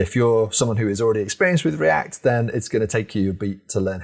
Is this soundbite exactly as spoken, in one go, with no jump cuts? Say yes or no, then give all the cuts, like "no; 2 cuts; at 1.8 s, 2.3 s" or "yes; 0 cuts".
yes; 0 cuts